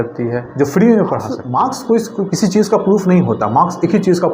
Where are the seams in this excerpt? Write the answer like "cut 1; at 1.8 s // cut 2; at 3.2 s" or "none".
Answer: cut 1; at 1.4 s